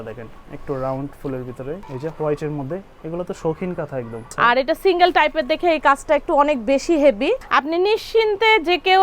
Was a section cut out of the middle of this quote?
yes; 3 cuts; at 1.8 s, 4.2 s, 7.4 s

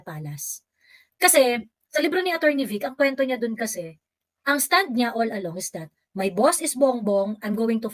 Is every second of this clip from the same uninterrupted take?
yes; 0 cuts

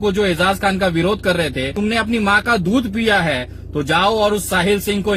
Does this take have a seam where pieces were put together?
yes; 1 cut; at 1.7 s

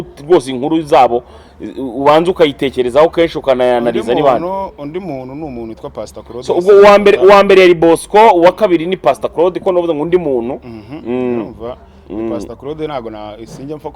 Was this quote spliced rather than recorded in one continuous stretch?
no; 0 cuts

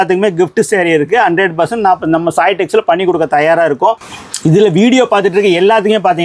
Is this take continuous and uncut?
yes; 0 cuts

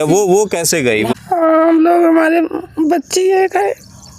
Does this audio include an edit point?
yes; 1 cut; at 1.1 s

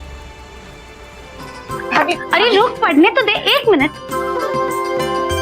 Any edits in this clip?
yes; 1 cut; at 1.5 s

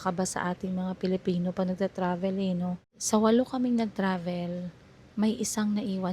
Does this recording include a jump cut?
yes; 1 cut; at 2.9 s

